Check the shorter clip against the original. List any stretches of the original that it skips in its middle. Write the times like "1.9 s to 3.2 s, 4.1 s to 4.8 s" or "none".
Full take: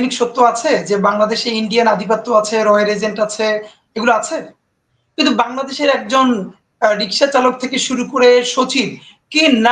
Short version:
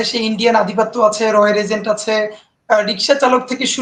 3.8 s to 6.6 s